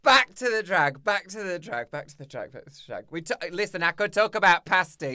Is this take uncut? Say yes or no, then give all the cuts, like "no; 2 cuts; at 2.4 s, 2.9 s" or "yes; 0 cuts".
yes; 0 cuts